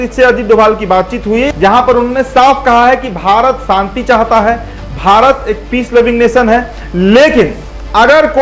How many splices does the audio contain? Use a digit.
1